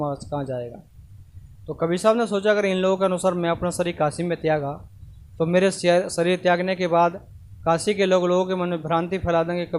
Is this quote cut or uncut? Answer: uncut